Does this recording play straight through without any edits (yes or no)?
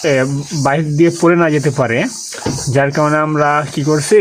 yes